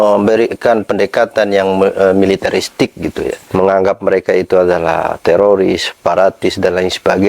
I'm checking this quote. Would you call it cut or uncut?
cut